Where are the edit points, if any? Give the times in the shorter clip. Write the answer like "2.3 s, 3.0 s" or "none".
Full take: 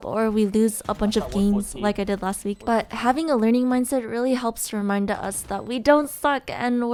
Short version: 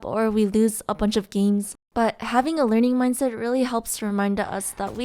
1.7 s